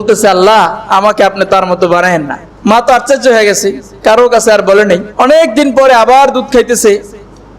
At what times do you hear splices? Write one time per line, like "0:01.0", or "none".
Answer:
0:02.4
0:05.1